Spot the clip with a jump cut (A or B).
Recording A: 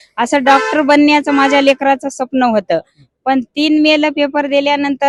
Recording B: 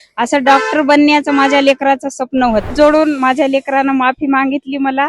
B